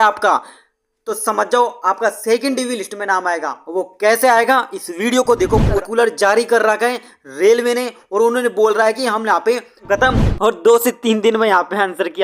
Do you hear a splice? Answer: yes; 2 cuts; at 5.8 s, 9.8 s

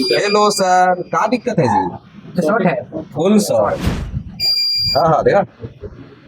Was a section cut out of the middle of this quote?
yes; 1 cut; at 4.0 s

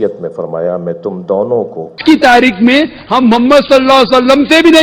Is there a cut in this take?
yes; 1 cut; at 1.9 s

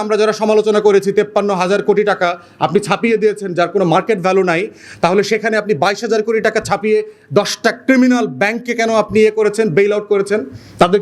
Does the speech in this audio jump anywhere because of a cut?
no; 0 cuts

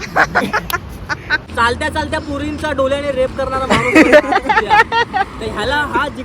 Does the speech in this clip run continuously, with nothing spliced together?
no; 1 cut; at 1.4 s

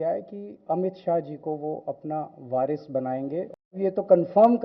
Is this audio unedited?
no; 1 cut; at 3.7 s

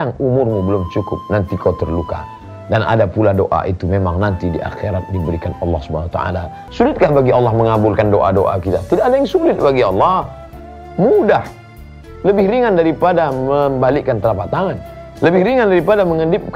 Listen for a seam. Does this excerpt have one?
yes; 1 cut; at 6.6 s

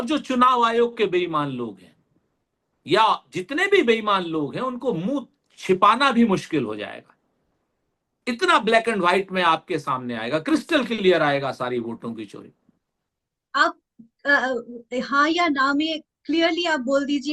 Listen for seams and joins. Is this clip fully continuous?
yes; 0 cuts

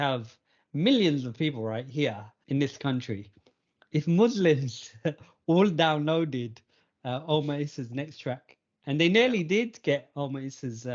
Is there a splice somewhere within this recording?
yes; 1 cut; at 2.3 s

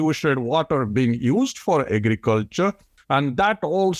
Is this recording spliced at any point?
no; 0 cuts

